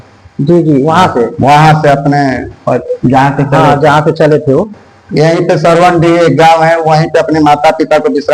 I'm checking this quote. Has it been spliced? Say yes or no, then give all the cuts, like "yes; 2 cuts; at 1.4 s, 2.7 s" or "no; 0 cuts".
no; 0 cuts